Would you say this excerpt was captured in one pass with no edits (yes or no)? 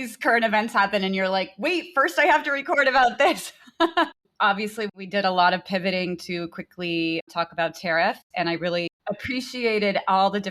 no